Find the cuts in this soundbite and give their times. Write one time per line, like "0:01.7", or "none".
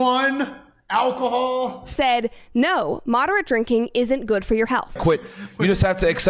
0:01.9
0:05.0